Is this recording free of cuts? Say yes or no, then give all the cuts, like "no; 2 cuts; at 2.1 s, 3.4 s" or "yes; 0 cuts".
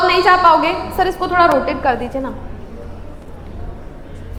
yes; 0 cuts